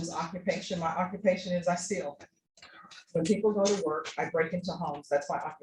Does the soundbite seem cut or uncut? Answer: uncut